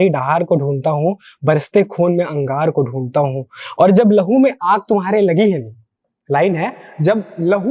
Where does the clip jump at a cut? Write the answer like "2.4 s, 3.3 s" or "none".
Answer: none